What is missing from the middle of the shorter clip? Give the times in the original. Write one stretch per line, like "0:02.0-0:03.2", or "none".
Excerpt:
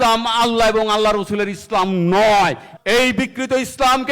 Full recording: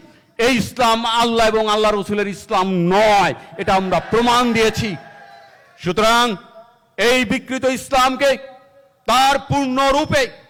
0:03.5-0:06.8